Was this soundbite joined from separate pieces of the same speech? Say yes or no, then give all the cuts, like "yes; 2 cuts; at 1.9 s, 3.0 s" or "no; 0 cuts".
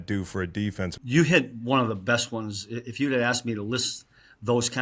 yes; 1 cut; at 1.0 s